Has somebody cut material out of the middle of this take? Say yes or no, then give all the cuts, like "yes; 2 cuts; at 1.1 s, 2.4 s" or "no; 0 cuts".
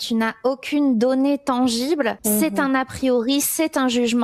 yes; 1 cut; at 2.2 s